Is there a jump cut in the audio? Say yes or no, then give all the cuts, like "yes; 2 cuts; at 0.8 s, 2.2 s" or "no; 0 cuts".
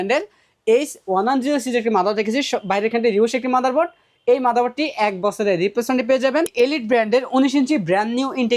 yes; 1 cut; at 6.5 s